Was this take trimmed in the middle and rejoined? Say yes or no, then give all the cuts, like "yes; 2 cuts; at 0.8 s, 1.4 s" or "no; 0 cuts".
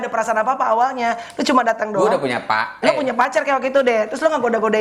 no; 0 cuts